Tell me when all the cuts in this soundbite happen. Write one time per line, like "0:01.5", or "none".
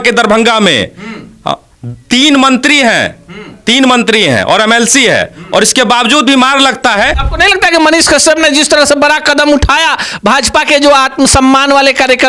0:07.2